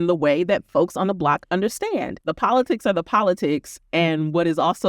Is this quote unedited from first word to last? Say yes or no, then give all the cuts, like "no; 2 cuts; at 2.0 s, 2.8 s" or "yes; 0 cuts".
no; 1 cut; at 2.2 s